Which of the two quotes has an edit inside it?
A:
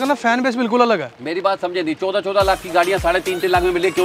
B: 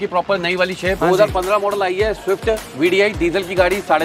B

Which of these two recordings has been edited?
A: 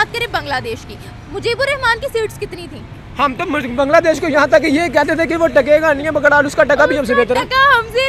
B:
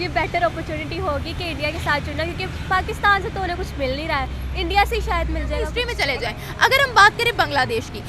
B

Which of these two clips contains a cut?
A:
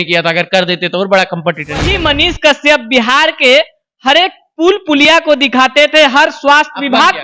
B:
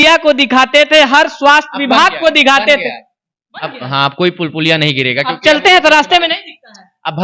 A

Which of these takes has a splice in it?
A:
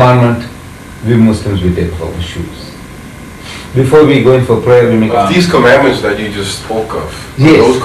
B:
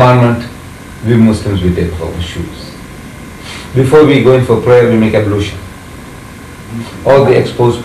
A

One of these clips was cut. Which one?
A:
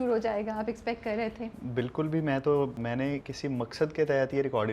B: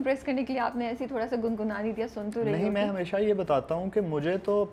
A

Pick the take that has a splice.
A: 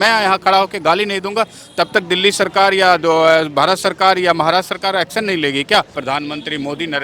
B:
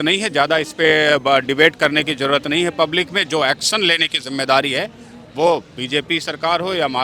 A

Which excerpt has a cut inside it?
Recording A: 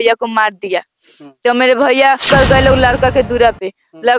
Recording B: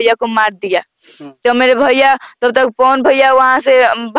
A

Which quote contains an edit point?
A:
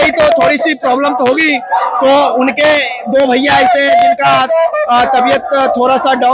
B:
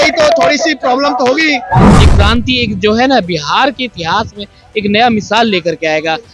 B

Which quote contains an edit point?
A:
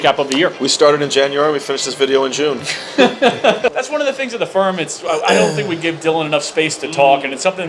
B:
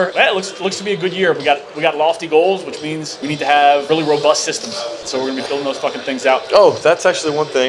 A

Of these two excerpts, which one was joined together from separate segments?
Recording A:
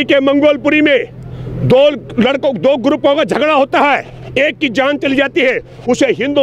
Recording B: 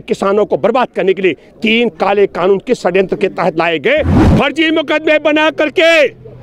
B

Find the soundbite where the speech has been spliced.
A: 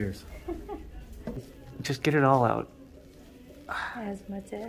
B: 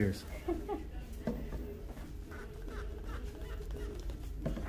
A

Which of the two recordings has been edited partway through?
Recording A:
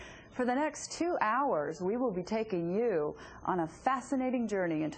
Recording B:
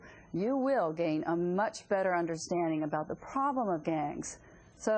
B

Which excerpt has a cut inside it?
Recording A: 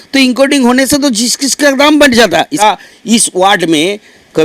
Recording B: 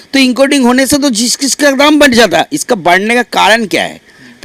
A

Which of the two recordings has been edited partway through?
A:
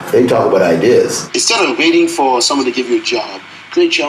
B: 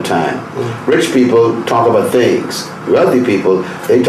A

